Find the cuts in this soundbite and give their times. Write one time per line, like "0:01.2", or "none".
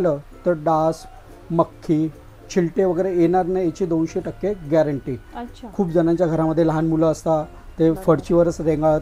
none

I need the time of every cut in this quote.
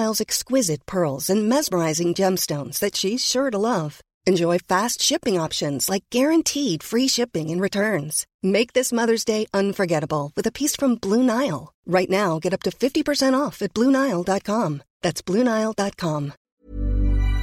0:16.4

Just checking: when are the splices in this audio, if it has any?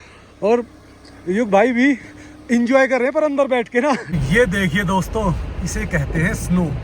0:04.1

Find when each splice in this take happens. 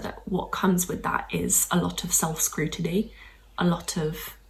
none

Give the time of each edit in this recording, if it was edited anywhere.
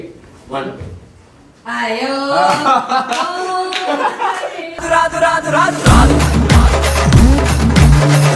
none

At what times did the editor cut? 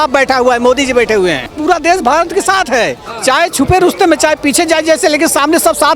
0:01.6

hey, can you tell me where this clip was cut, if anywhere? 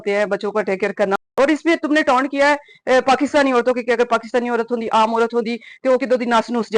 0:01.3

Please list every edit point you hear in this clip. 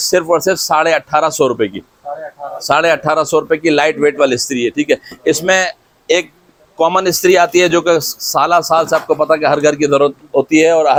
none

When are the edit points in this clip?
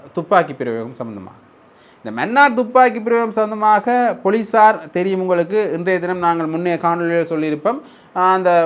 none

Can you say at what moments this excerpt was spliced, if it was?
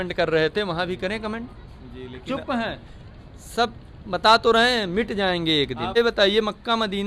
0:06.0

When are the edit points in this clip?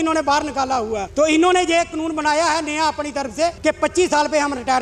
0:01.1
0:03.6

